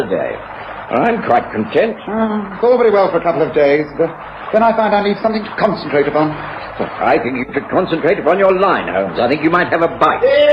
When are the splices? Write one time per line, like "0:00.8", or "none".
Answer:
0:07.5